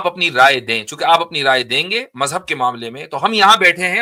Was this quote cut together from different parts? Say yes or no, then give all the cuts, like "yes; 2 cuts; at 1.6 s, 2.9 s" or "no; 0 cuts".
no; 0 cuts